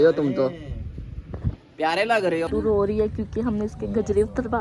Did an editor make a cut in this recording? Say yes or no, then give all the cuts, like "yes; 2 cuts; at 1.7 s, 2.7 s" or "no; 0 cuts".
yes; 1 cut; at 2.5 s